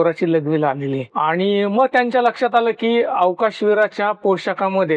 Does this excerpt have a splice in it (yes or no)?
yes